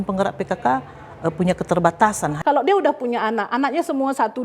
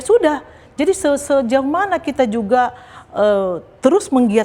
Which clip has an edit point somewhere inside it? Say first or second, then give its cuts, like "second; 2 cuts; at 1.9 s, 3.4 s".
first; 1 cut; at 2.3 s